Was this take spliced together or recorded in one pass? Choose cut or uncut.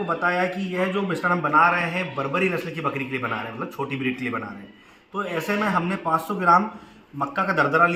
uncut